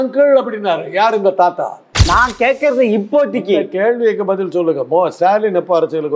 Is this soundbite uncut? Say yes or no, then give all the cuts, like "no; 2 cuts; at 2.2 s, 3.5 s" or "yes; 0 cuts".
no; 1 cut; at 2.0 s